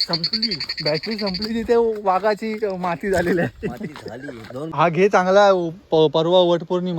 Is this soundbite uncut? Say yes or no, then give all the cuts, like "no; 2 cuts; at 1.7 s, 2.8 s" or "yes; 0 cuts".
no; 1 cut; at 4.7 s